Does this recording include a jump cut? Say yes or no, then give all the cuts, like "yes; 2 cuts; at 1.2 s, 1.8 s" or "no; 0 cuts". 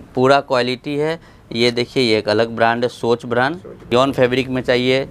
yes; 1 cut; at 3.9 s